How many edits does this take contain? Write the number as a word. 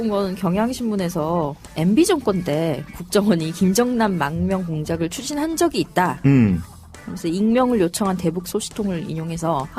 one